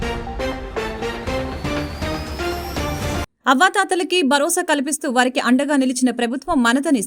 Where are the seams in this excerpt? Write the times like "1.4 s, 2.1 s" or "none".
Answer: 3.3 s